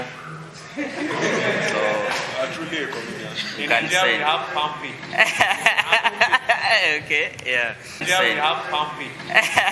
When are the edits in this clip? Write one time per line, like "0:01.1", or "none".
0:08.0